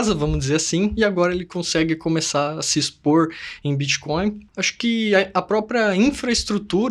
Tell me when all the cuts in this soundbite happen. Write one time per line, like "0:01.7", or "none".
0:04.4